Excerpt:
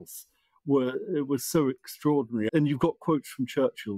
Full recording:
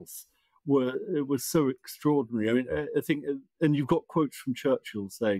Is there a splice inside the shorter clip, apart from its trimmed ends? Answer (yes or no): yes